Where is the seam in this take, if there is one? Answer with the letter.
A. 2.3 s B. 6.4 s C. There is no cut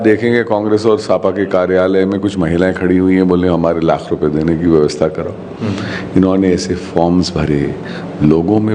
C